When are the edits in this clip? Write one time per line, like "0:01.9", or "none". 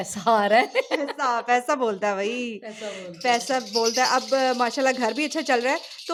none